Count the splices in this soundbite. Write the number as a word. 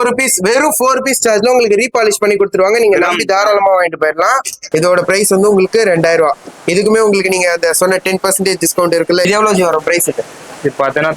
two